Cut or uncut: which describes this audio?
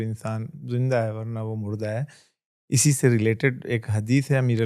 uncut